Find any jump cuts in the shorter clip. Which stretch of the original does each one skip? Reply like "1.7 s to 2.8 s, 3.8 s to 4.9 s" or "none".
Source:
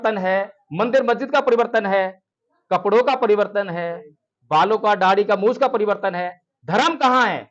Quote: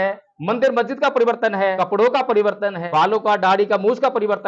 2.1 s to 2.7 s, 3.7 s to 4.4 s